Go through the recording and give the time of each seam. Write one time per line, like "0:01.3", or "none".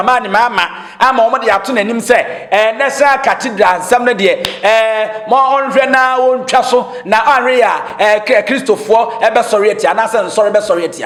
none